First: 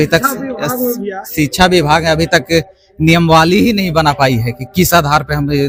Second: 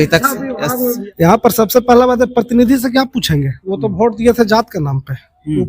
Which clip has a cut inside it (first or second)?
second